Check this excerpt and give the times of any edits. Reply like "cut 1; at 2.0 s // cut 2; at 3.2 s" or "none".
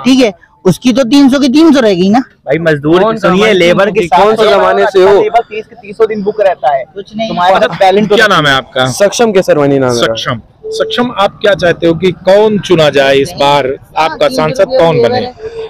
none